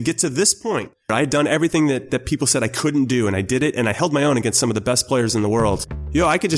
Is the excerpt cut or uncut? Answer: cut